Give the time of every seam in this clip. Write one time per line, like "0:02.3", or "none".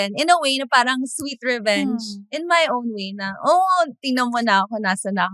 none

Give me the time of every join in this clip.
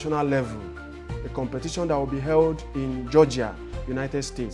none

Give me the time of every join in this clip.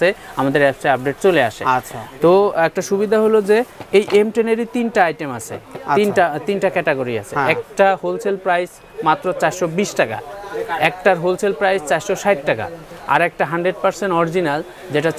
none

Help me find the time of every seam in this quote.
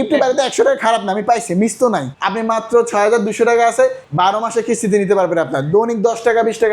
0:02.1
0:04.0

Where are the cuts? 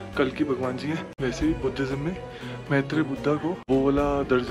0:01.1
0:03.6

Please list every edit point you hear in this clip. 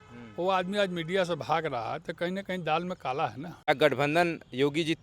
0:03.7

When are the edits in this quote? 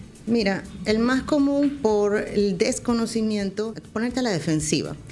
0:03.8

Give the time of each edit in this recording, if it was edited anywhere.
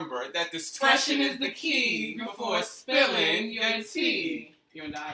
0:01.6

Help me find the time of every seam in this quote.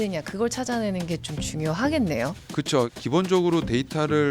0:02.7

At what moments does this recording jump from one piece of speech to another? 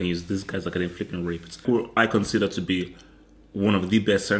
0:01.6

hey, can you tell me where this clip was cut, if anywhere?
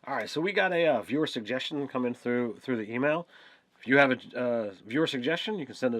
0:03.6

